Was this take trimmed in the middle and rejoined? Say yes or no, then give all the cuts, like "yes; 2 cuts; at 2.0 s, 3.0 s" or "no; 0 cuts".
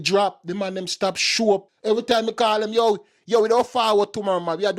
yes; 1 cut; at 1.7 s